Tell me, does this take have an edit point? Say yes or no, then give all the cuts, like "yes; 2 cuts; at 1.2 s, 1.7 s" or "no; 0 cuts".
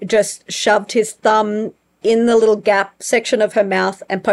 no; 0 cuts